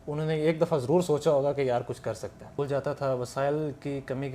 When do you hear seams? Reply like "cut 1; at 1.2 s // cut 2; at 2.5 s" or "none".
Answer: cut 1; at 2.4 s